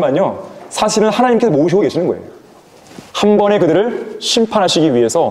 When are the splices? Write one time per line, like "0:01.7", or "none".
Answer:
none